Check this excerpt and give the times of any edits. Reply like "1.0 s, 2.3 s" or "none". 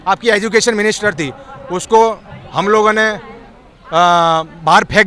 none